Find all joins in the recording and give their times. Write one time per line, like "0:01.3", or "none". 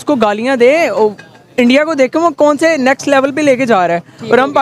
none